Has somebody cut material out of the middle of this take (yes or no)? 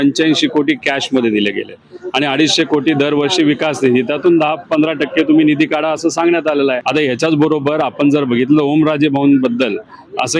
no